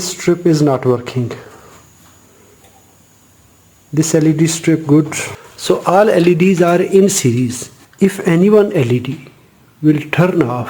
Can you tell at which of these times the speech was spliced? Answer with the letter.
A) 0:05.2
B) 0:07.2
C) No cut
A